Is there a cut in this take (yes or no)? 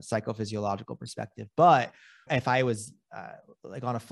yes